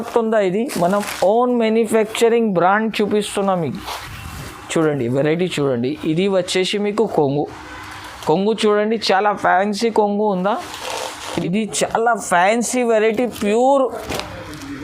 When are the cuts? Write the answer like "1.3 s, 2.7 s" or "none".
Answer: 11.2 s